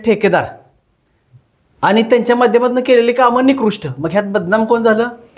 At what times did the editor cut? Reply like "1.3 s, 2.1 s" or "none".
none